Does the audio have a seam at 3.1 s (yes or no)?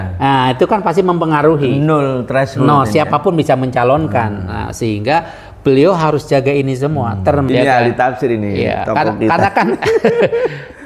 no